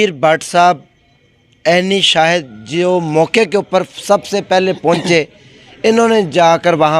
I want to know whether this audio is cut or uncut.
uncut